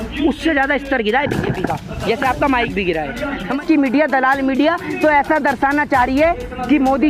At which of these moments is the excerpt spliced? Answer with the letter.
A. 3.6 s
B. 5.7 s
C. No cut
A